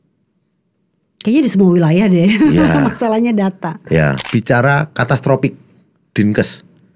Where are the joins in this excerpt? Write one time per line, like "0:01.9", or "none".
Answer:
0:04.2